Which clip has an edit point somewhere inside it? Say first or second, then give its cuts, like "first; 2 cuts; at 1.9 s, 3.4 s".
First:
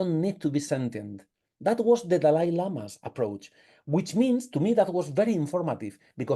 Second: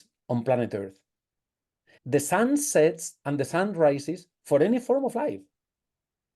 second; 1 cut; at 1.9 s